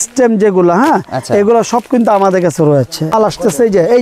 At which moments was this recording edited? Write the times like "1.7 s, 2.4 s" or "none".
3.1 s